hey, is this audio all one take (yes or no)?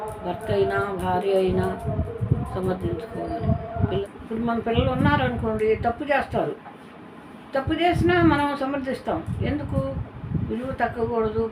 no